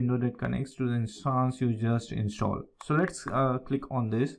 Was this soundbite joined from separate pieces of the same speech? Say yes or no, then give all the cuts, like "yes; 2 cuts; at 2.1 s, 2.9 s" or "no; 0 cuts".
no; 0 cuts